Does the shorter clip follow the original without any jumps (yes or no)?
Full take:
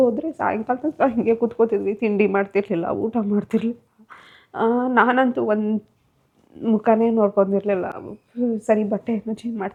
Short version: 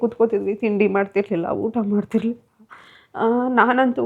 yes